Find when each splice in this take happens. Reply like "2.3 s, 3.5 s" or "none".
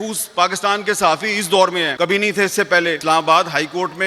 1.9 s, 3.0 s